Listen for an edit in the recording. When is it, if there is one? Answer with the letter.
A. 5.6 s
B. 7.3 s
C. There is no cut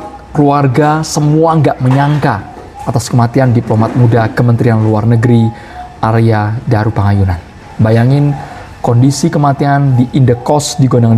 C